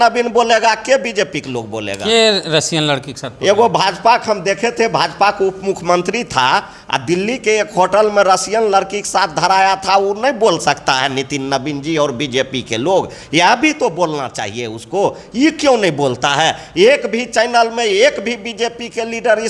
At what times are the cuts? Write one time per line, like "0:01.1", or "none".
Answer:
none